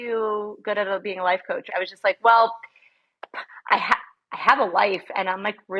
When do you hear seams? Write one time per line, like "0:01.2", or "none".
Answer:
0:01.7